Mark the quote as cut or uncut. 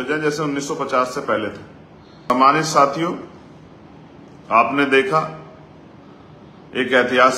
cut